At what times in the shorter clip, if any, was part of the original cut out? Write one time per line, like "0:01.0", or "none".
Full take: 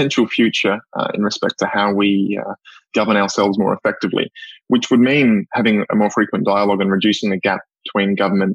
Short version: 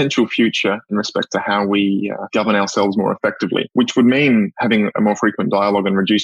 0:00.9
0:02.2
0:03.7